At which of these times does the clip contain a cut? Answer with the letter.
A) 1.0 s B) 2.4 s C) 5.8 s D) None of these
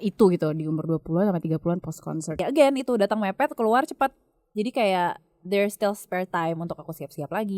B